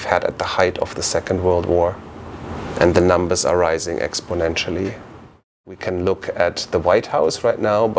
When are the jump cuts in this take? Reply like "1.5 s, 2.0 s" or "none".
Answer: 5.8 s

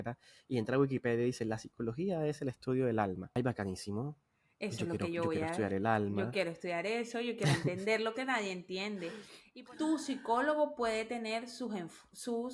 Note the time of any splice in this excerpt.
3.4 s, 9.3 s

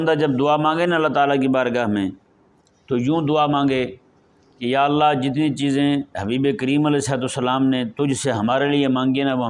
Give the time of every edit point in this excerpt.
none

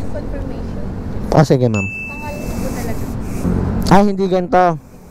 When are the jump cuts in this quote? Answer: 3.4 s

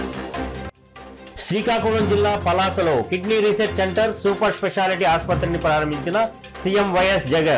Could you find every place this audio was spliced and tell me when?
1.2 s

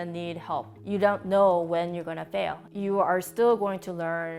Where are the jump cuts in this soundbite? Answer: 2.6 s

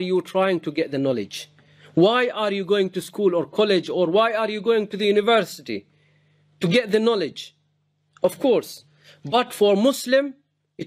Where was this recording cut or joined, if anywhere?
none

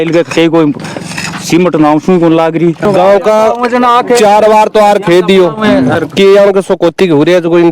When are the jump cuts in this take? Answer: 2.8 s

